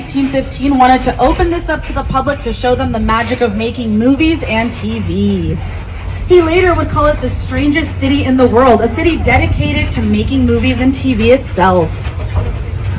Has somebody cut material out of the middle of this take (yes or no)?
no